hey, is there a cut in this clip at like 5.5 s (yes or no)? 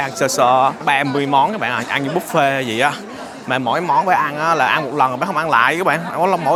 no